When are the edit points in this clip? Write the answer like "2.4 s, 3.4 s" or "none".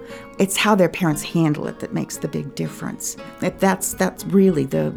3.3 s